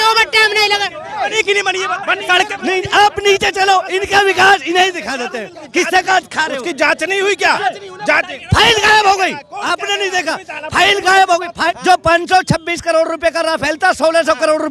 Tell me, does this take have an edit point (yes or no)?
yes